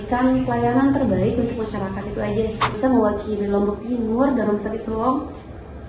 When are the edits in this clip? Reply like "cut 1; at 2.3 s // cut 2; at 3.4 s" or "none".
cut 1; at 2.7 s